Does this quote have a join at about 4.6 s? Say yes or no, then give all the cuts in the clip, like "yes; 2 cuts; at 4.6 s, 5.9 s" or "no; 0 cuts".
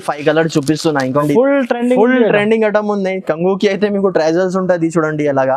no; 1 cut; at 1.2 s